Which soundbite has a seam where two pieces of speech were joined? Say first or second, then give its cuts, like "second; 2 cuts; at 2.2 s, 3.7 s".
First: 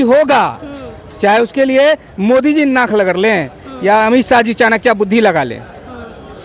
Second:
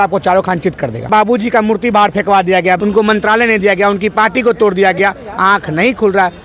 second; 2 cuts; at 1.1 s, 2.8 s